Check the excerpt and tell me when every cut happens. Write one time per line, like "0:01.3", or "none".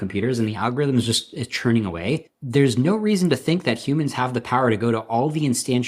0:02.3